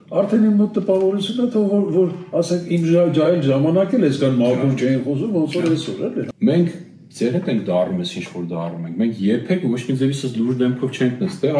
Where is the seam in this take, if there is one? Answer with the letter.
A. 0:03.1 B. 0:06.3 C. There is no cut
B